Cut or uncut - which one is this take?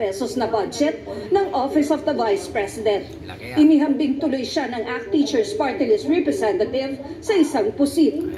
uncut